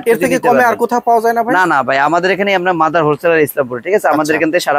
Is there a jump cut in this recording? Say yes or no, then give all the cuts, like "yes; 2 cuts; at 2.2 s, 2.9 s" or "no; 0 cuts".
no; 0 cuts